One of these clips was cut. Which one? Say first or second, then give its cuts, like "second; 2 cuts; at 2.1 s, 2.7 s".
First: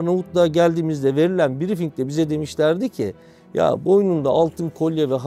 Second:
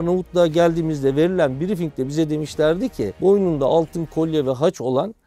second; 1 cut; at 3.2 s